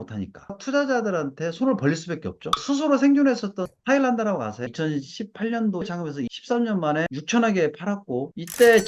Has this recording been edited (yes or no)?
no